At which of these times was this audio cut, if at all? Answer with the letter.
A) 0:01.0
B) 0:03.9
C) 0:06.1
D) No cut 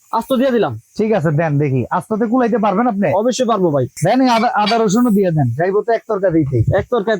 B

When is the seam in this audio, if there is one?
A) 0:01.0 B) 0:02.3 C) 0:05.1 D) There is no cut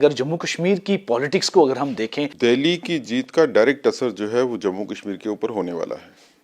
B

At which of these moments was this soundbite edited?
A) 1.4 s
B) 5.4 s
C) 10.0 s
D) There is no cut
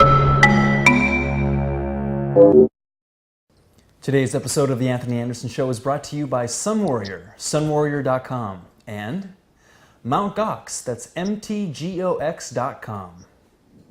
D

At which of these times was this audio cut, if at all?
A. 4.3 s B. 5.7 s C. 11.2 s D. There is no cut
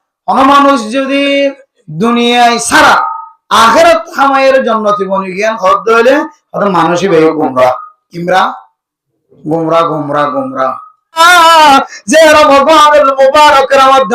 C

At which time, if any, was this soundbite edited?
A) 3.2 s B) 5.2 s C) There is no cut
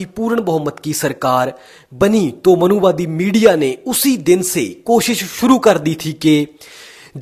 C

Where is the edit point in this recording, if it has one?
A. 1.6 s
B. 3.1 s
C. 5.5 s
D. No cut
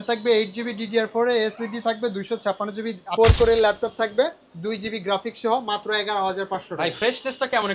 B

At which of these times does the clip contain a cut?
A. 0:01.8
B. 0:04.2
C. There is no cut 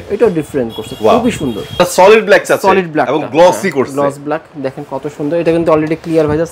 A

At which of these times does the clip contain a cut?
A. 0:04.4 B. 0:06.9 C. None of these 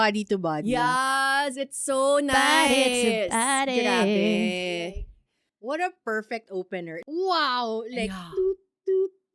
B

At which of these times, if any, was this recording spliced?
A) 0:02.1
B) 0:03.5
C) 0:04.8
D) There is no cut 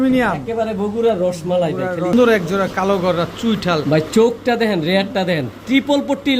A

